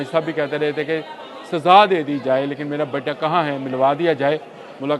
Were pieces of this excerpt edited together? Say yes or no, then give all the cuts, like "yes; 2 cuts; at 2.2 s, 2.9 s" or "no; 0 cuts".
no; 0 cuts